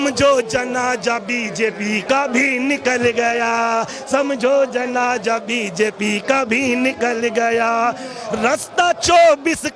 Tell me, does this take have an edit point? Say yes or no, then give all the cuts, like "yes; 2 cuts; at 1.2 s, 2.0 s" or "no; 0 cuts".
no; 0 cuts